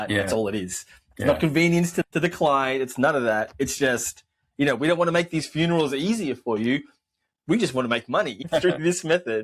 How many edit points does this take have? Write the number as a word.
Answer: two